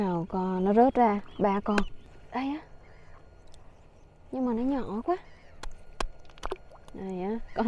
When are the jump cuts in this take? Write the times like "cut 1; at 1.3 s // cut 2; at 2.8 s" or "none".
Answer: cut 1; at 2.0 s